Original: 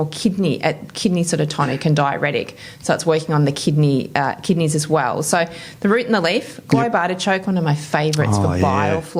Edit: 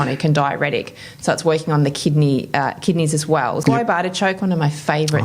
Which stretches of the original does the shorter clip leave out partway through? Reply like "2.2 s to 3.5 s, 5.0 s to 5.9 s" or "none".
5.2 s to 6.6 s